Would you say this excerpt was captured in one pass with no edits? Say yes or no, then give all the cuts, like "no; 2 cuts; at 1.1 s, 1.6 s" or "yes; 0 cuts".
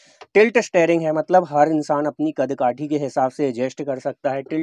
yes; 0 cuts